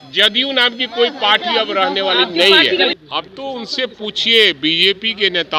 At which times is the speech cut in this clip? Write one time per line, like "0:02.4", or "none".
none